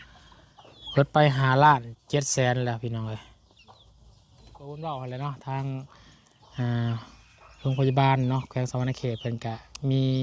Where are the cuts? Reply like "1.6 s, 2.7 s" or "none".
4.7 s